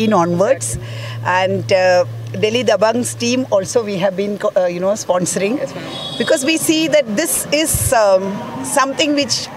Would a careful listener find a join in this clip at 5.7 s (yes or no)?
no